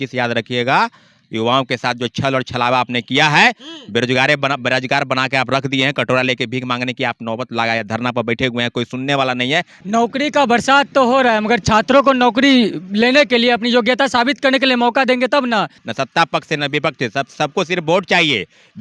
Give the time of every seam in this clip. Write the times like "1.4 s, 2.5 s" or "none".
9.8 s, 15.8 s